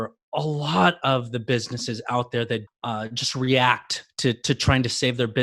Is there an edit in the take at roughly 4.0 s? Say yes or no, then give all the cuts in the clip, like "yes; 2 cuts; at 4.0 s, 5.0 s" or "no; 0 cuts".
no; 1 cut; at 2.7 s